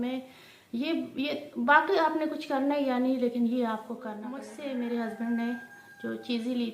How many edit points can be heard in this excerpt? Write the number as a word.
one